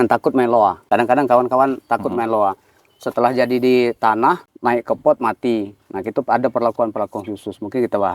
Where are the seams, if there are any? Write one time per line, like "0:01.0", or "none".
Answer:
0:00.8
0:04.5